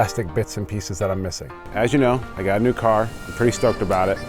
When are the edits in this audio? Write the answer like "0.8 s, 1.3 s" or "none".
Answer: 1.7 s